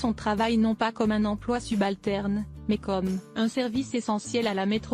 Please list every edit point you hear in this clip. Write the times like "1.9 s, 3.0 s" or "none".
none